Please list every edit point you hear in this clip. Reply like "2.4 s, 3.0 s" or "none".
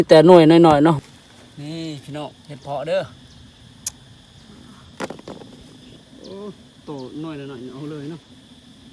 1.0 s, 6.0 s